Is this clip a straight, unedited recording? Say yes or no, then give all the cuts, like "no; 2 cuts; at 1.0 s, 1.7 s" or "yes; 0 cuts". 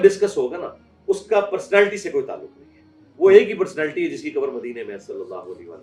yes; 0 cuts